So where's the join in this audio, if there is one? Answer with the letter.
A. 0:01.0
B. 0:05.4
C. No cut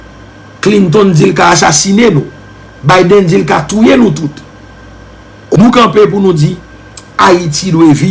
B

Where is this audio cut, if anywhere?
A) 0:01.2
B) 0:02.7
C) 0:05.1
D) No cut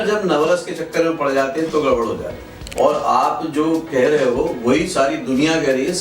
B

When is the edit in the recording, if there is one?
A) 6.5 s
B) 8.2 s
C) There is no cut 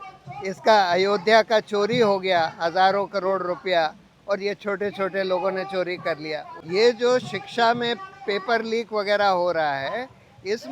A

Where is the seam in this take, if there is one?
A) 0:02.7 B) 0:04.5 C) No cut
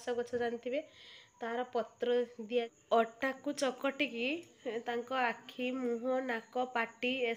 A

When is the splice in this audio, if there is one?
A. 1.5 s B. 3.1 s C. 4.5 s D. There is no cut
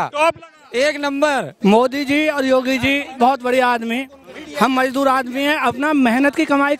A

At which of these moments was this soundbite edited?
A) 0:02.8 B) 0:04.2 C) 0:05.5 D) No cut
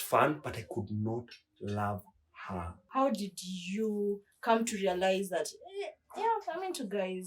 A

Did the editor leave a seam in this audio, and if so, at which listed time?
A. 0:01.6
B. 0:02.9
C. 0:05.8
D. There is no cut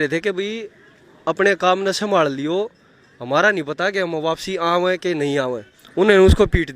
C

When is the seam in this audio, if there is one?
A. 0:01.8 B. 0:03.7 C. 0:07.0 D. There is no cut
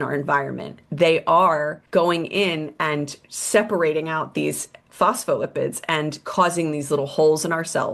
A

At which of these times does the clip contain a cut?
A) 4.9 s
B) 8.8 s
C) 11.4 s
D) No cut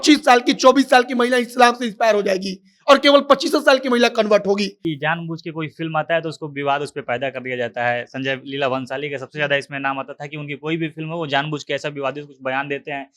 A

